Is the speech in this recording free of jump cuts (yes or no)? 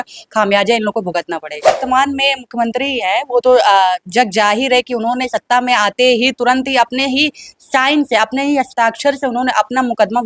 no